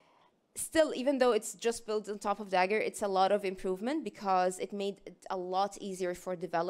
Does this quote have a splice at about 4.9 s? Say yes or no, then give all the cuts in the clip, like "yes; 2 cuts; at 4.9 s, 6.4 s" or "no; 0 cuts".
no; 0 cuts